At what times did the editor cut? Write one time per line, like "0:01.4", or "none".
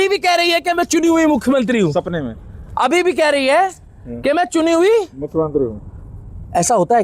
none

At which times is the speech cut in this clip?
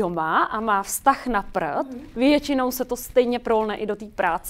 none

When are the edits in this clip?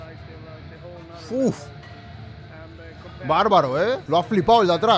0:04.0

